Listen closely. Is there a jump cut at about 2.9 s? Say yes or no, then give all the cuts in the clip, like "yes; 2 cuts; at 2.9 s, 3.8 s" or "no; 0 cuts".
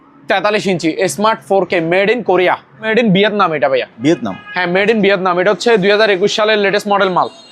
yes; 1 cut; at 2.9 s